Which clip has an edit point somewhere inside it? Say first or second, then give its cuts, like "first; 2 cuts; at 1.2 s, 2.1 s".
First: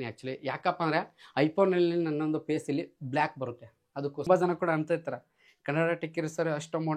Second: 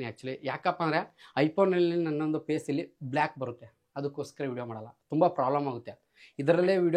first; 1 cut; at 4.3 s